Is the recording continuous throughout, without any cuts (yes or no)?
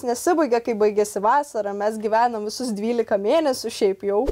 yes